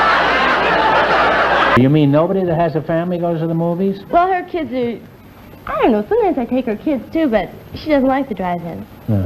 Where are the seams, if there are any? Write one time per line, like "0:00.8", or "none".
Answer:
0:01.8